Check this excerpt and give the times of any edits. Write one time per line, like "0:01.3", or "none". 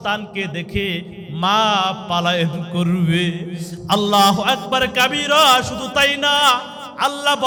none